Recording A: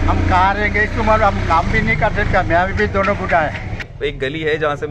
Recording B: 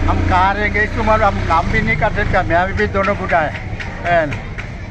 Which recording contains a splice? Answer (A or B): A